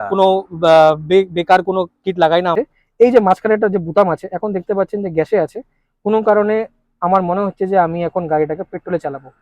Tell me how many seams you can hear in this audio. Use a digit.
1